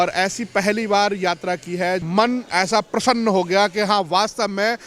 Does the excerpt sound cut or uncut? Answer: cut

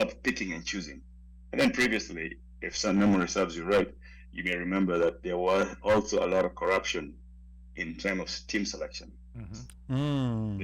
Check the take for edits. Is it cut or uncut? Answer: uncut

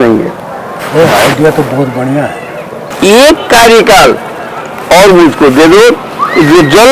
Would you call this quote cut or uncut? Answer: cut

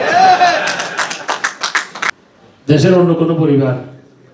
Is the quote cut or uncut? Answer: cut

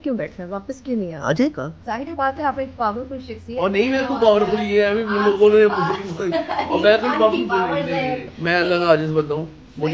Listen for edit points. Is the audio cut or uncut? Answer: cut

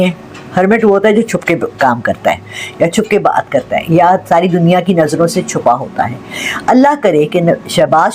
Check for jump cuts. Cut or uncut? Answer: uncut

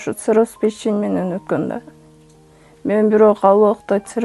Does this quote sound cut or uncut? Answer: uncut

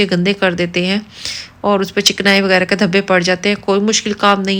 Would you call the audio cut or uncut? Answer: uncut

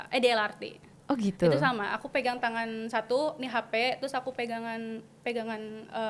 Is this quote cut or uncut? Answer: uncut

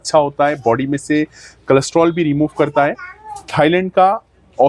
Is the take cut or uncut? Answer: uncut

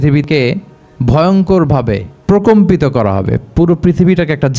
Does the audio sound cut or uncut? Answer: cut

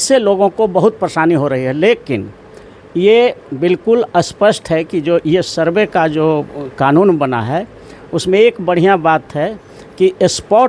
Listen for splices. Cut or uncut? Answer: uncut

